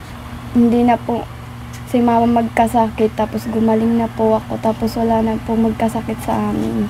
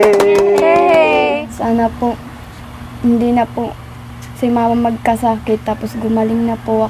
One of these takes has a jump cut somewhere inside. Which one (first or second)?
second